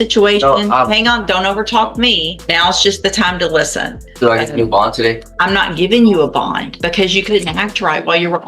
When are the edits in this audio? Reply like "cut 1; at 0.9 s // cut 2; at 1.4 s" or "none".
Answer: cut 1; at 2.3 s // cut 2; at 4.0 s // cut 3; at 5.3 s // cut 4; at 6.7 s